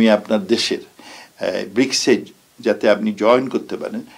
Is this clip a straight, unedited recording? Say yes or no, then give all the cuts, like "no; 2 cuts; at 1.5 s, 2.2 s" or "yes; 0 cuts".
yes; 0 cuts